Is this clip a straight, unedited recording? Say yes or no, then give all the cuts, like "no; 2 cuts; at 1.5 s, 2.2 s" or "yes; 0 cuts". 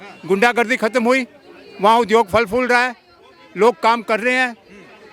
yes; 0 cuts